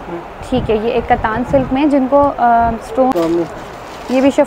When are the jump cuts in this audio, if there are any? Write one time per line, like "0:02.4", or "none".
0:03.1